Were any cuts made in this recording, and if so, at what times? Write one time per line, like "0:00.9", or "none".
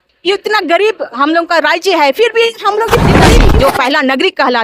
0:03.3

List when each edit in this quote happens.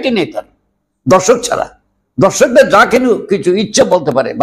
none

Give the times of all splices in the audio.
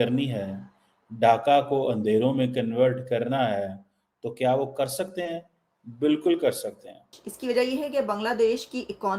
0:07.3

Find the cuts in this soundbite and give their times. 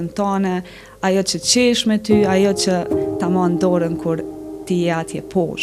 none

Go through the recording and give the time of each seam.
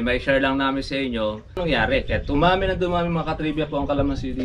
0:01.6

